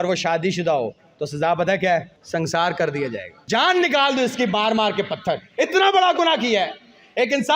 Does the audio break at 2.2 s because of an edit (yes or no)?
yes